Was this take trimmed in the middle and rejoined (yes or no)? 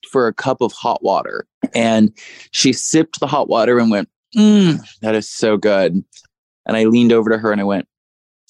yes